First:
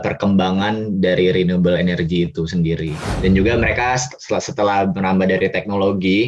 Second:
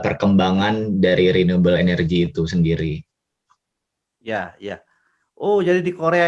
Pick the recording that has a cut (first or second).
first